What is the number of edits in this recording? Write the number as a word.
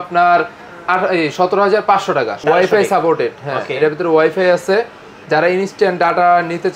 one